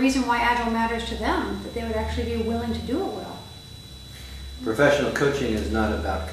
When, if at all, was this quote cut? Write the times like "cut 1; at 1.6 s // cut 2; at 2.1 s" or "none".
cut 1; at 3.5 s